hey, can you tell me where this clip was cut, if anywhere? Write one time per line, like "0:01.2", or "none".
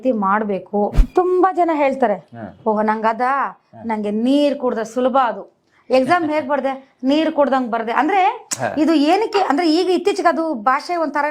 0:01.0